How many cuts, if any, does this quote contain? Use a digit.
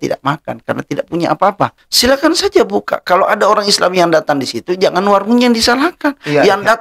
1